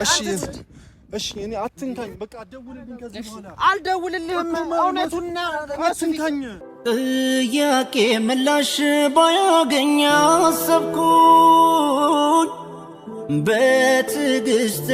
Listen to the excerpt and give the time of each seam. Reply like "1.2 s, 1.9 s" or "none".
6.6 s

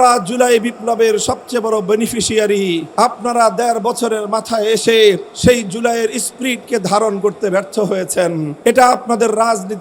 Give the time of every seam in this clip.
2.9 s, 5.3 s, 8.5 s

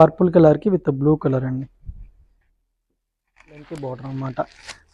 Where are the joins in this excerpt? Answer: 3.7 s

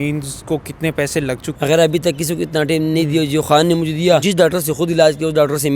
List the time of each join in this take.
1.5 s, 4.2 s

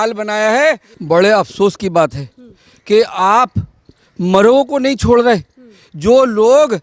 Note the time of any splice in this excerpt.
0.9 s

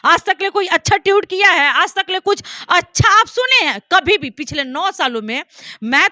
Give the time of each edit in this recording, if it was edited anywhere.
none

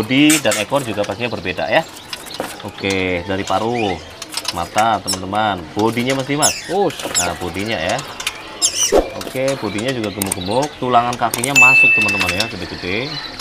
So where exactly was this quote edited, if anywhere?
none

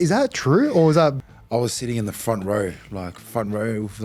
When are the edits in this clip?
1.3 s

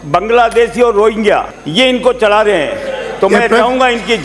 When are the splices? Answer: 1.6 s

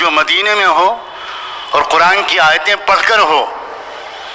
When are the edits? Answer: none

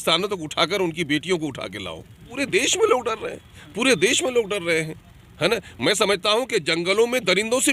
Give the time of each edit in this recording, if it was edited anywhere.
2.3 s

